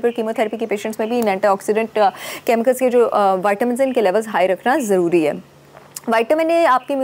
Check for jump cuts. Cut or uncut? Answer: uncut